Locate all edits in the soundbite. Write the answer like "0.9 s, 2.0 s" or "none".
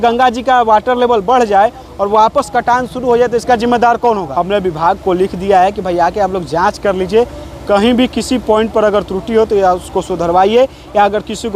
4.3 s